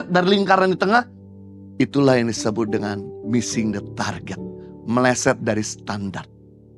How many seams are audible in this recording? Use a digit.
0